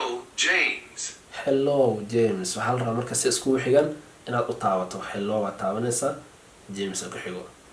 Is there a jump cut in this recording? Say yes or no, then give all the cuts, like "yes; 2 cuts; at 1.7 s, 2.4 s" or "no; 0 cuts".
no; 0 cuts